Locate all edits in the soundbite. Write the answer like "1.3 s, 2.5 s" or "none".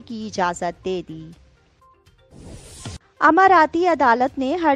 1.8 s, 3.0 s